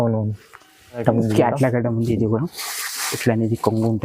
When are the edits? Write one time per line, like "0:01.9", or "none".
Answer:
0:01.0